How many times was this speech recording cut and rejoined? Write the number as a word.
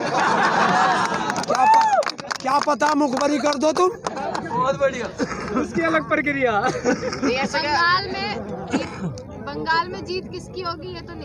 zero